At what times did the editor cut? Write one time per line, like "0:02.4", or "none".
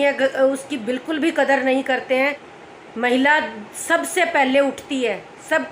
0:02.5